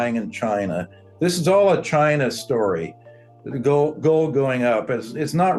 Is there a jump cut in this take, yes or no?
no